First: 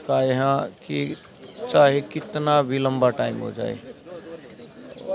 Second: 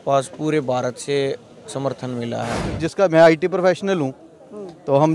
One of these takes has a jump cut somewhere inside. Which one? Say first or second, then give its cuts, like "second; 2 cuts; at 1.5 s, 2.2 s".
second; 1 cut; at 2.8 s